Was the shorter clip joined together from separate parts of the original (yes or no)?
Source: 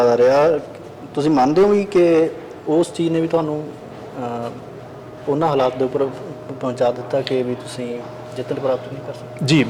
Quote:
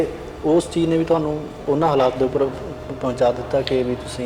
yes